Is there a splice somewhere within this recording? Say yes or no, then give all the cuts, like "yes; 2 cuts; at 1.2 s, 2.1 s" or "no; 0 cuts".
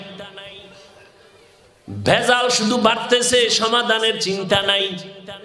no; 0 cuts